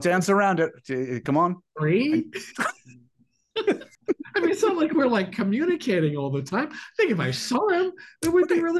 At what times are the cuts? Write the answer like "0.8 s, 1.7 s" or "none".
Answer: 3.9 s